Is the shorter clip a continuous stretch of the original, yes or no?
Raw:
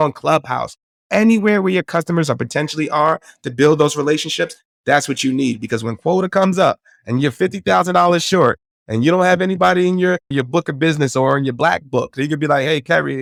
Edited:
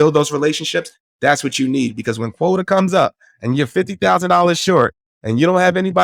yes